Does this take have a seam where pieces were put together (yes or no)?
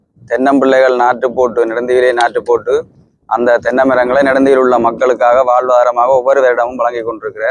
no